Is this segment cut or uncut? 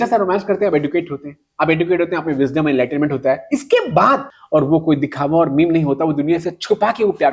cut